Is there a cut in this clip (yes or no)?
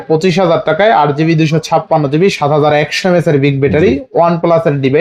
no